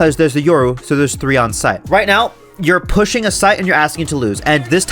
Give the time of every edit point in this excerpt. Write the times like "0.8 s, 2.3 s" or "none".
1.8 s